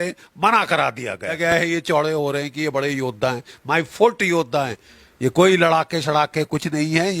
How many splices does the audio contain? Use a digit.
2